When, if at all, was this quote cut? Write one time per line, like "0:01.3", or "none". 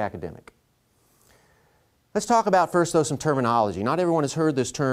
0:02.0